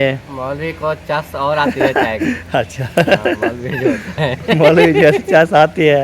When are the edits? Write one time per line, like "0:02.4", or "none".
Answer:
none